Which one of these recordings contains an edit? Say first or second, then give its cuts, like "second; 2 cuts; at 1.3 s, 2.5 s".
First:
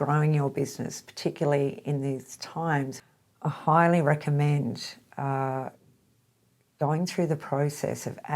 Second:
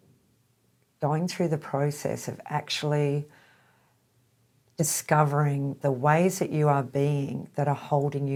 first; 1 cut; at 3.0 s